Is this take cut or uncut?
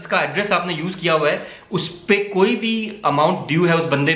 uncut